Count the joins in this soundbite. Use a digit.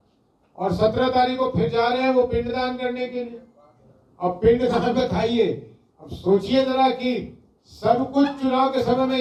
0